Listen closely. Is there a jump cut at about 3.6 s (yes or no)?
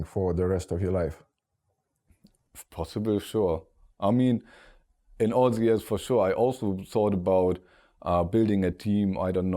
no